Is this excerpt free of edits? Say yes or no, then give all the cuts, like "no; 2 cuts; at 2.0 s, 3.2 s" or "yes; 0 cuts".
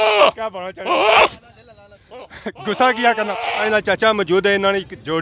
yes; 0 cuts